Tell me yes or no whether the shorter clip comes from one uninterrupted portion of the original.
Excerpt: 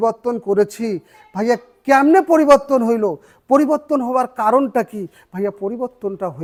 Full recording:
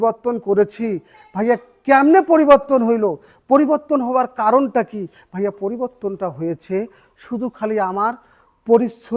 yes